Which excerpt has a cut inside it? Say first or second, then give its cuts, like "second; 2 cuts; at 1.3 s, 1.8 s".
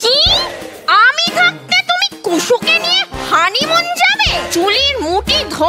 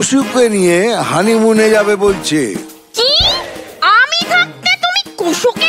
first; 1 cut; at 4.5 s